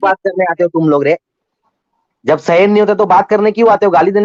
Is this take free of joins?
yes; 0 cuts

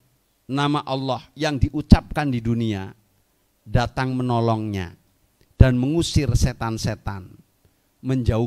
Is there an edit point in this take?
no; 0 cuts

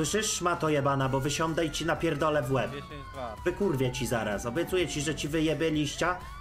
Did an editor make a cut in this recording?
no; 0 cuts

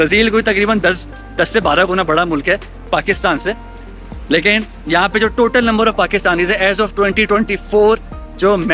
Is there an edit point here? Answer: no; 0 cuts

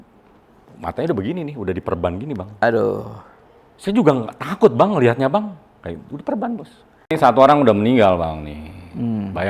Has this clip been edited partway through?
yes; 1 cut; at 7.1 s

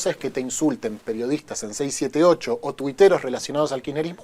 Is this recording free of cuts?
yes; 0 cuts

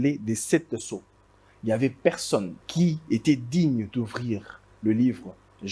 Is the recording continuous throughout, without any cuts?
no; 1 cut; at 2.6 s

